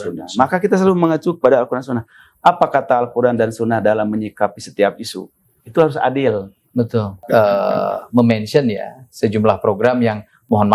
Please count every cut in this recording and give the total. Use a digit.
1